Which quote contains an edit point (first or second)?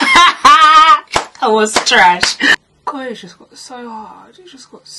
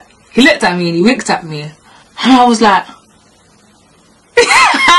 first